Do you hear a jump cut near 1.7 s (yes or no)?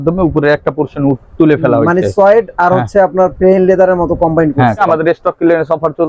no